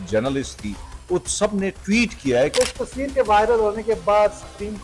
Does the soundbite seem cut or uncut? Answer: cut